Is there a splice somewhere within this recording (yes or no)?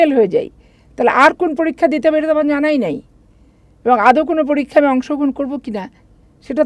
no